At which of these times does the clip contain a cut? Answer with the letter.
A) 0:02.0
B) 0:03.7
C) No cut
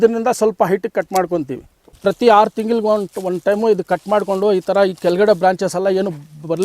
A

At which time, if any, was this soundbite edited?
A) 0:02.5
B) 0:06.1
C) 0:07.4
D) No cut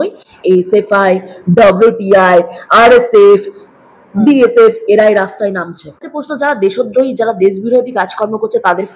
B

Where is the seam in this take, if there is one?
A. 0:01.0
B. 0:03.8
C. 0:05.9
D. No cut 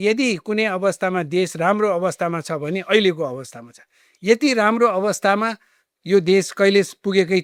D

